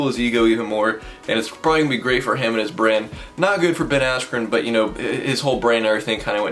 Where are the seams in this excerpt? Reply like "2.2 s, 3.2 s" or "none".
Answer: none